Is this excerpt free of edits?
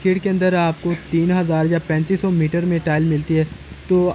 yes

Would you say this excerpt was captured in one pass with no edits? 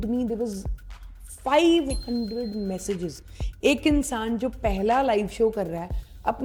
yes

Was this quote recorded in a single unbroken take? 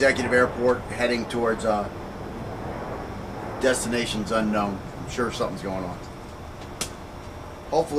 no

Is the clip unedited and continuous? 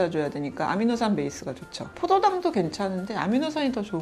yes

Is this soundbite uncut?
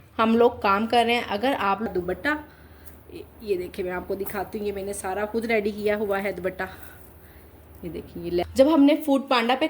no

